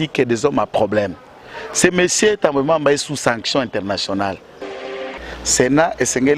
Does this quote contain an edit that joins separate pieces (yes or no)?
yes